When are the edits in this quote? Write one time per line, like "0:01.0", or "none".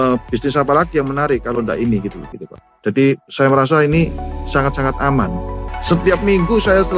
0:02.4
0:05.8